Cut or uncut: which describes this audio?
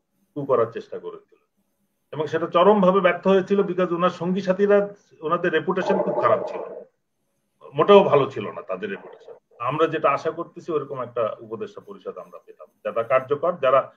cut